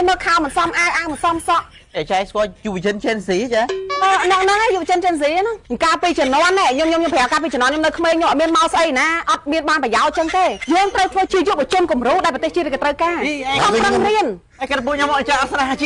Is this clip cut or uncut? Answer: cut